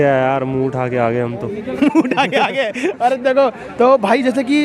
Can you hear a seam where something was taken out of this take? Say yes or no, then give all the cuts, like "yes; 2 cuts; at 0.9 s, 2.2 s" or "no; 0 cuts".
no; 0 cuts